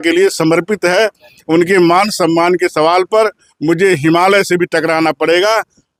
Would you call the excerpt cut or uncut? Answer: uncut